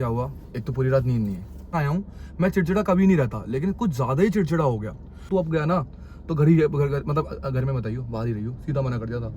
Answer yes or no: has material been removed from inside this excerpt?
yes